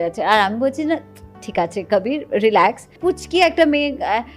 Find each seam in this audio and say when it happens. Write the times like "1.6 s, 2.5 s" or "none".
2.9 s